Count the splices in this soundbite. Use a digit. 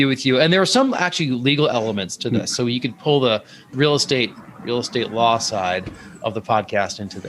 1